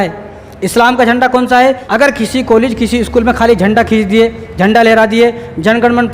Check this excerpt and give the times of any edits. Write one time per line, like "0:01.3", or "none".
0:01.8